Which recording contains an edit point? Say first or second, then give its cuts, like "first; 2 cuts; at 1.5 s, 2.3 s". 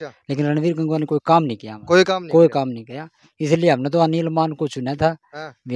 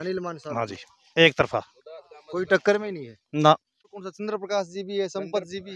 second; 1 cut; at 3.7 s